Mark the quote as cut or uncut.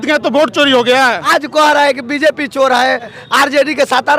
cut